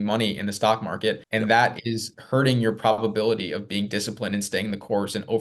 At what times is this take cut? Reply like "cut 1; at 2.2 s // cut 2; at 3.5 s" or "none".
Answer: cut 1; at 1.2 s